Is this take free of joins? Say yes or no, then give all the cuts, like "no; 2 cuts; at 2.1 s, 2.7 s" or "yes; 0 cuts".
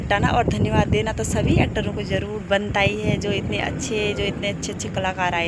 yes; 0 cuts